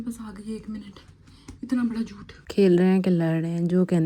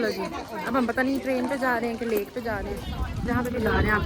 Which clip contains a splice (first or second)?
first